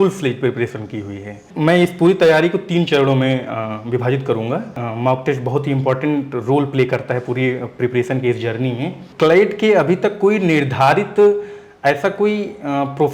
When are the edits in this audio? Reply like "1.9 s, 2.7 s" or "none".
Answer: 1.5 s, 4.8 s, 9.1 s